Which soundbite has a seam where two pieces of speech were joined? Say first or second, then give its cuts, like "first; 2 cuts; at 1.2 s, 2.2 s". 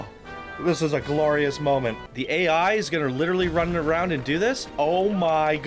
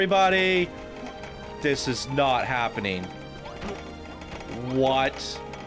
first; 1 cut; at 2.1 s